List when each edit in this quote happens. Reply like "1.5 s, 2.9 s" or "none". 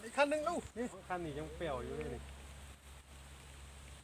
1.0 s

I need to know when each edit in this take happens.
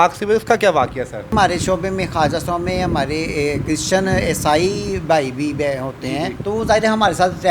1.3 s, 6.4 s

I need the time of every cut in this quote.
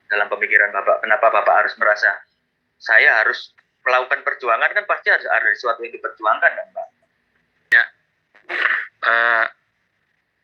7.7 s

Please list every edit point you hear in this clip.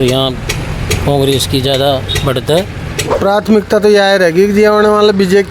3.2 s

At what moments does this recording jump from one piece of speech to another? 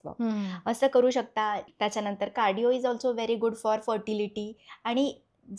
1.7 s

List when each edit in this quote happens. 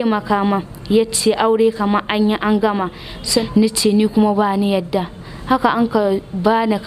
3.4 s

